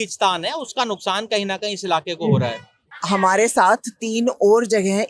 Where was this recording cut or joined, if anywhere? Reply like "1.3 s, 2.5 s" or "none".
2.9 s